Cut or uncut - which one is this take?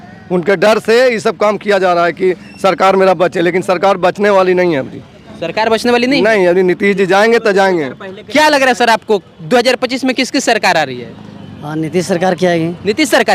uncut